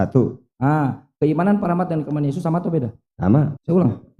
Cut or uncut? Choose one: uncut